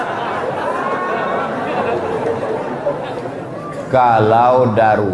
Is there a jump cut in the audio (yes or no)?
no